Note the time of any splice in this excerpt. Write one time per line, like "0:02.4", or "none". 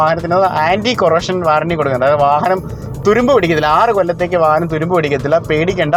none